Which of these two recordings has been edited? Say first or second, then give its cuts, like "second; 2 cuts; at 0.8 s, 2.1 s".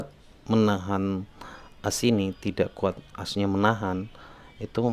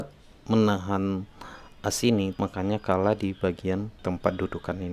second; 2 cuts; at 2.4 s, 3.9 s